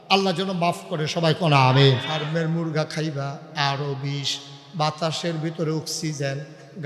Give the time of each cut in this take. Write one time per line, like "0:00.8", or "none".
0:02.2